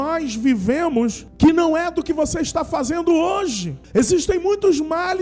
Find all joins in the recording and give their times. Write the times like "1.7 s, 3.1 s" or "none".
1.2 s, 3.7 s

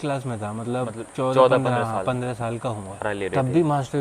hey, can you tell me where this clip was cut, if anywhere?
3.0 s

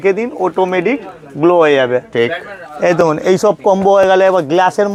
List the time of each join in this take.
none

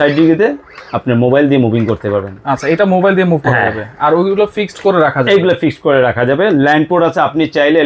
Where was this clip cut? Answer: none

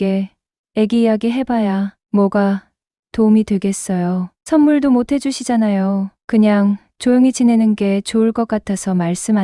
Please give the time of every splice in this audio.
none

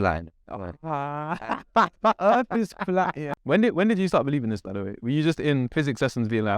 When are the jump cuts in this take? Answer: 3.3 s

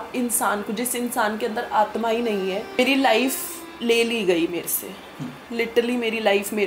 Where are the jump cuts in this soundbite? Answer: 2.7 s

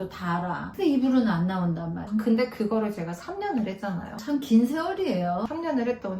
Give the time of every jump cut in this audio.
2.1 s

